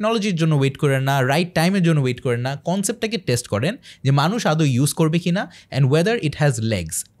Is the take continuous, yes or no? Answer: yes